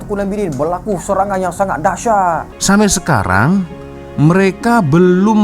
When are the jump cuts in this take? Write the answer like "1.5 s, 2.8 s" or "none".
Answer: 2.5 s

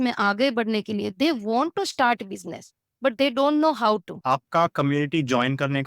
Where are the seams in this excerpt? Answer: 4.1 s

